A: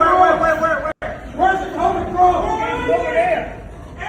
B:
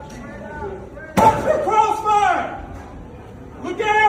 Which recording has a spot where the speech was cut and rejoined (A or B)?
A